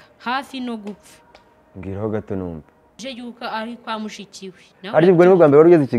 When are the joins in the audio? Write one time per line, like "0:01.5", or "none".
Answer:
0:03.0